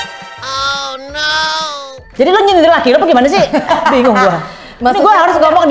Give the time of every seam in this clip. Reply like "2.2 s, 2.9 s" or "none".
2.0 s